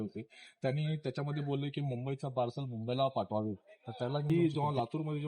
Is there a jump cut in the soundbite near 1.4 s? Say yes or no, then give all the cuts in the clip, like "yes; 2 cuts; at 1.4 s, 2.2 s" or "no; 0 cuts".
no; 1 cut; at 4.3 s